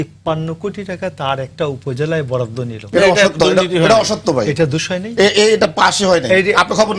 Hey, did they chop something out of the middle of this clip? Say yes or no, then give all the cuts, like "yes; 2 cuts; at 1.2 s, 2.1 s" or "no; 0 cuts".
no; 0 cuts